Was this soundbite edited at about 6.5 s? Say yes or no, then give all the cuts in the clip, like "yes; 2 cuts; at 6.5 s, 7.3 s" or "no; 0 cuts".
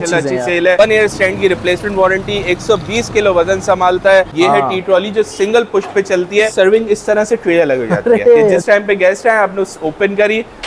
yes; 4 cuts; at 0.8 s, 4.3 s, 6.5 s, 8.6 s